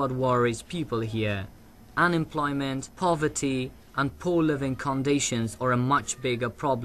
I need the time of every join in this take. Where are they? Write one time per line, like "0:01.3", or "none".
none